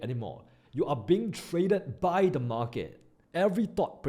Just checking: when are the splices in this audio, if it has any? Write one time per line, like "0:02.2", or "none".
0:03.1

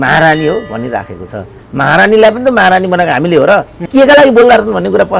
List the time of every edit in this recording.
0:03.9

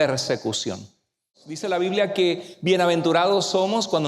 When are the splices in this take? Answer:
0:01.5

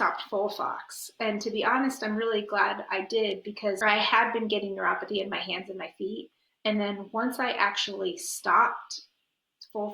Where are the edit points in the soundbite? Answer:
0:03.8

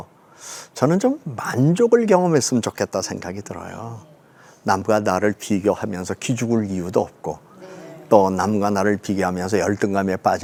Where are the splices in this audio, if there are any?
none

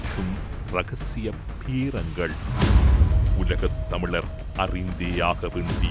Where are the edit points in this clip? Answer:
none

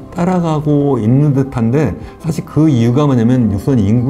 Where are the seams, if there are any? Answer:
none

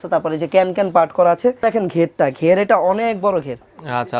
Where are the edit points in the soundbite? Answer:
0:01.6

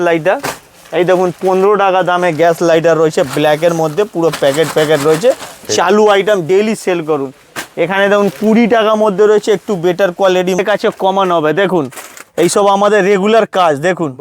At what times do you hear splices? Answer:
0:10.6

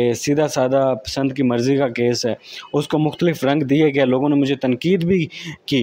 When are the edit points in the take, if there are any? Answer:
none

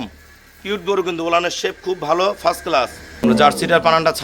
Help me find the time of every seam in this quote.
0:03.2

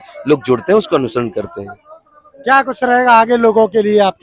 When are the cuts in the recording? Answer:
none

